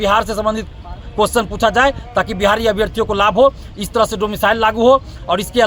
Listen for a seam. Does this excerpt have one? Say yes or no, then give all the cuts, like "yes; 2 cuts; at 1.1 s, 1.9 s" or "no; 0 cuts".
no; 0 cuts